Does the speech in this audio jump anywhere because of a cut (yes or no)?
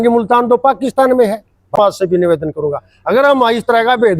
yes